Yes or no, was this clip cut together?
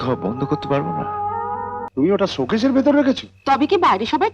yes